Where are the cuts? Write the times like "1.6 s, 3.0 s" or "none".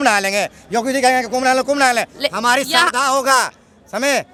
none